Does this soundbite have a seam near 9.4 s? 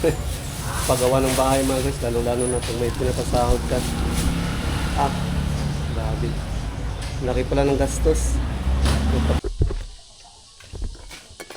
yes; 1 cut; at 9.4 s

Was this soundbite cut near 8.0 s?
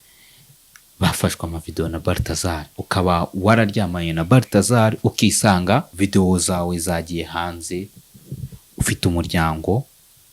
no; 2 cuts; at 2.7 s, 5.9 s

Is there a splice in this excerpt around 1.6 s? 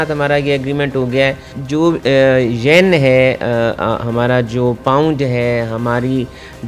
yes; 1 cut; at 1.6 s

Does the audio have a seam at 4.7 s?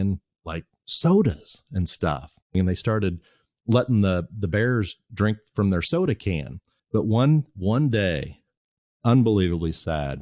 no; 2 cuts; at 2.5 s, 6.5 s

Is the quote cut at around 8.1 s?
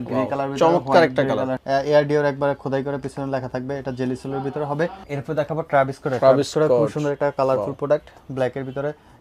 no; 2 cuts; at 1.6 s, 5.0 s

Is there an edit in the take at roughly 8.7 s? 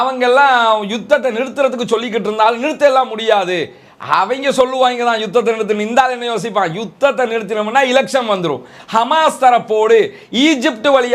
yes; 1 cut; at 8.7 s

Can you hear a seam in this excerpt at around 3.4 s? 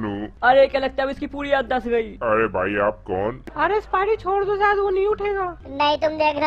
yes; 1 cut; at 3.4 s

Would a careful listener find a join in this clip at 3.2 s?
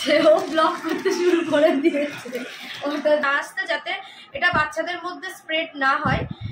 yes; 1 cut; at 3.2 s

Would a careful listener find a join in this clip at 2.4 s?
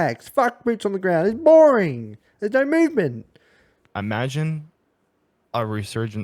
no; 1 cut; at 3.8 s

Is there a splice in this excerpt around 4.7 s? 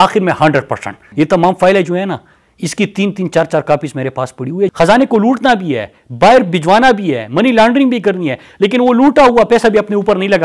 yes; 2 cuts; at 1.0 s, 4.7 s

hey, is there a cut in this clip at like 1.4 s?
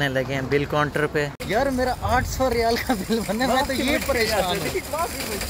yes; 1 cut; at 1.4 s

